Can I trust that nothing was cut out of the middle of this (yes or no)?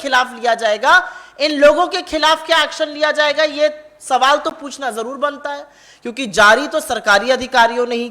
yes